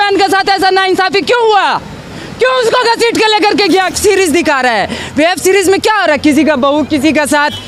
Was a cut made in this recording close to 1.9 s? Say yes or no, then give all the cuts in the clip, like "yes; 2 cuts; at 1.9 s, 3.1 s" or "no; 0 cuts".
no; 1 cut; at 3.9 s